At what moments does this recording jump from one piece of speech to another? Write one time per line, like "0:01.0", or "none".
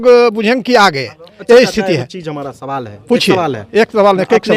none